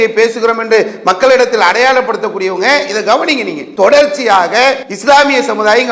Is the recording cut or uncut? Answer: cut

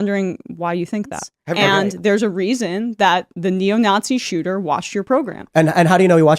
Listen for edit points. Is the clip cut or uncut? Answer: cut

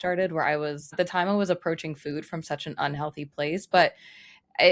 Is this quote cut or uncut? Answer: cut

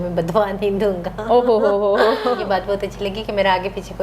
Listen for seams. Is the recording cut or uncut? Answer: cut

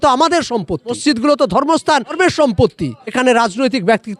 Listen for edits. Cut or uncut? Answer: cut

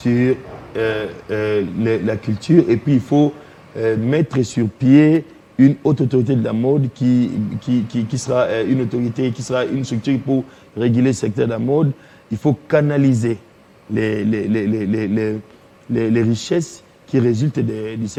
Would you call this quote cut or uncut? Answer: uncut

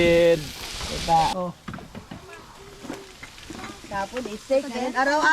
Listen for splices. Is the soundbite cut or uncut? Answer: cut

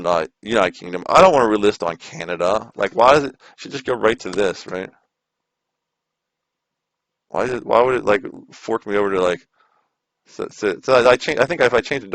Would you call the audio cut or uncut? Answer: uncut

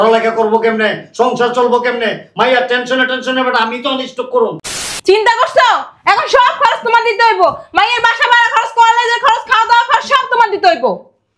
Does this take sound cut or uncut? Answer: cut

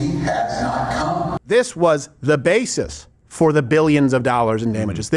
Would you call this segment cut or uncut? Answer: cut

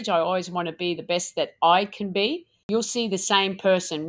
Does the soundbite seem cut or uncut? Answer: cut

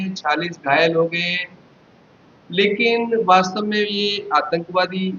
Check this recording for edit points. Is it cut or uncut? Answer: cut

